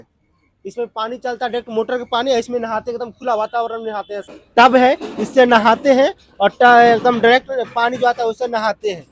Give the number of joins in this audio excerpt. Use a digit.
0